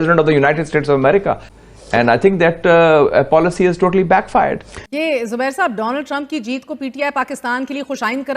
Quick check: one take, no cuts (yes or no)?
no